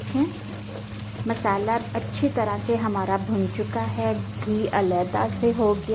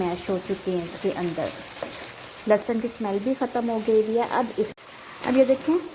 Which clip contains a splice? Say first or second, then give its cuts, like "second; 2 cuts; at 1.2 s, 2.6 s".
second; 1 cut; at 4.7 s